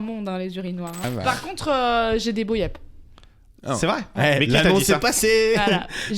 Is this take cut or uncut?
cut